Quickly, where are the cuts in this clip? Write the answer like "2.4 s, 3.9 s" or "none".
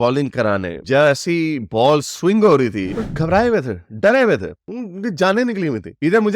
3.0 s